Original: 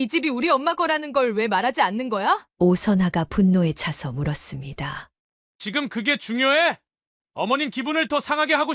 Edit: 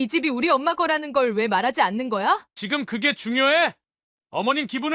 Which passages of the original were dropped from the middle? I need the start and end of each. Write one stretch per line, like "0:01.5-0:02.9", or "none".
0:02.5-0:05.5